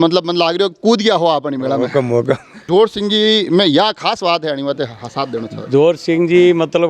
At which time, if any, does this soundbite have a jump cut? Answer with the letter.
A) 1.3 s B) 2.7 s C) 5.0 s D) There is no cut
B